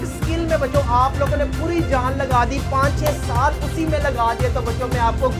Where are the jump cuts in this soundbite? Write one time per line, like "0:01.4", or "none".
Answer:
none